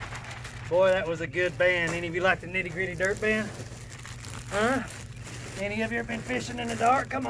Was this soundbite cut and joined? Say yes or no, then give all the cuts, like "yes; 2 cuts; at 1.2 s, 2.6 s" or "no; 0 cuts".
no; 0 cuts